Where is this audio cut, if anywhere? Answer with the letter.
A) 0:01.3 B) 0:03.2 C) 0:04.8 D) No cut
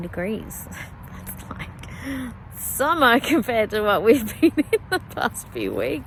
D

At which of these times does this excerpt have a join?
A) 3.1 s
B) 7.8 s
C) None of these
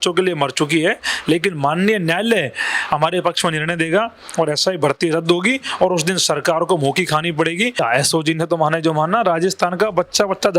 B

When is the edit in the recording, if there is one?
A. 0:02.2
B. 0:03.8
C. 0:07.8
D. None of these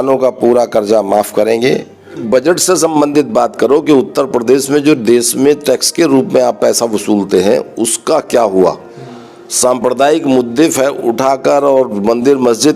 A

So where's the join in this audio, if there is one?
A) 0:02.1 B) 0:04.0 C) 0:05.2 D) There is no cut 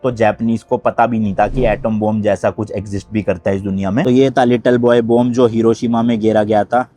B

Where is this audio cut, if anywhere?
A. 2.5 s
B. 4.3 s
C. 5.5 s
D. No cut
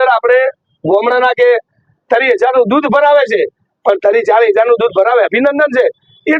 D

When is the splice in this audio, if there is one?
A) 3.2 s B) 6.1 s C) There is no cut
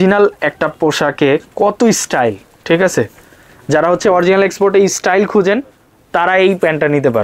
C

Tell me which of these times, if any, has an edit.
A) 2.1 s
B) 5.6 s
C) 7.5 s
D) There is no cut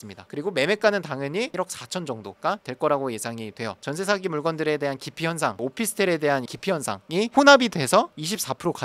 B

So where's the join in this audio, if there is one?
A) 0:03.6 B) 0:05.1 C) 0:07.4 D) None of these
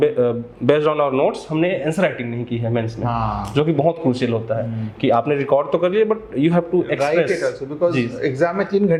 D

